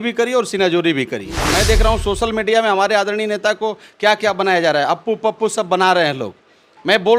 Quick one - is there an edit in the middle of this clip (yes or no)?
yes